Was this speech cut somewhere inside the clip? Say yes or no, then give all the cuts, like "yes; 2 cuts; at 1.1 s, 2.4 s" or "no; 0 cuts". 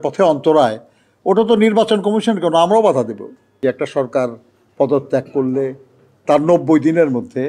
yes; 1 cut; at 3.5 s